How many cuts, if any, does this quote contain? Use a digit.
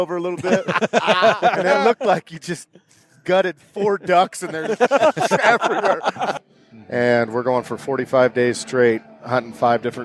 1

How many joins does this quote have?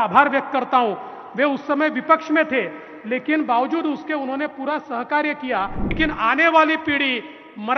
1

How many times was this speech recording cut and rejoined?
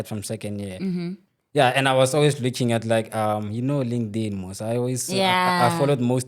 1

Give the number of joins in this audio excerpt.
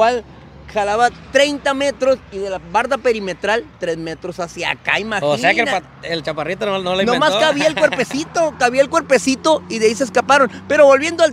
0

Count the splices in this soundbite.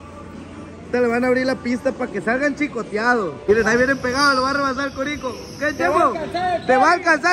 1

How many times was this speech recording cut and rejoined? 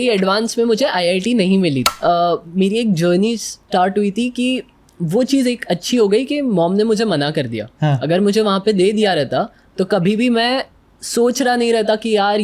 1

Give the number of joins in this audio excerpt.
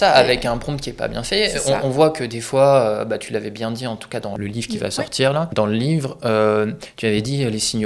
2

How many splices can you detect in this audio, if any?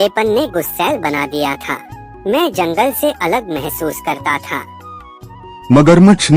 0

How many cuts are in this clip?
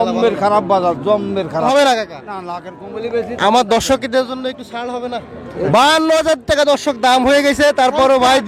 2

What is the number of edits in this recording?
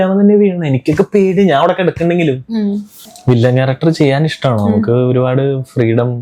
1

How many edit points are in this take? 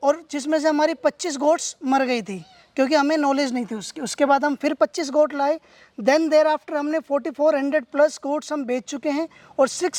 0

